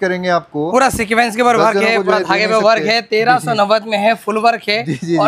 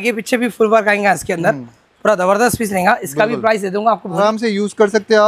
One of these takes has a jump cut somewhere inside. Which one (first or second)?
second